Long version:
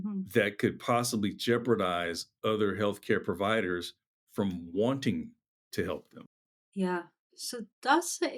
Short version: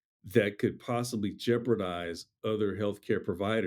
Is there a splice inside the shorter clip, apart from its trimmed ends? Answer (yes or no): no